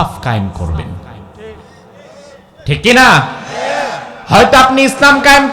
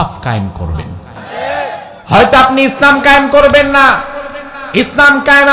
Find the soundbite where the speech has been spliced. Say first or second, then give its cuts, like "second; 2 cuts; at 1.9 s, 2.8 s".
second; 1 cut; at 1.2 s